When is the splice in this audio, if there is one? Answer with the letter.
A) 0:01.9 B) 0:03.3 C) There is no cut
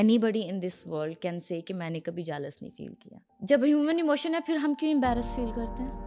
C